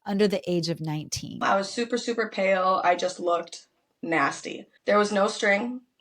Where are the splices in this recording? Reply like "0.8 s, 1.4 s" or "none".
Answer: 1.4 s, 4.7 s